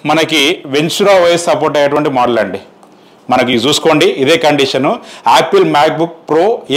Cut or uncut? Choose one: uncut